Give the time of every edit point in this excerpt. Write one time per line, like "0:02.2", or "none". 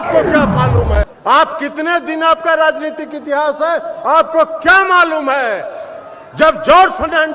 0:01.1